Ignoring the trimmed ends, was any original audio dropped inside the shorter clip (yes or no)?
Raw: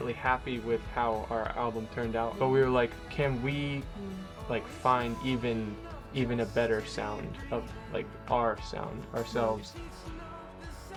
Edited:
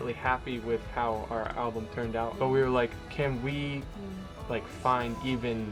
no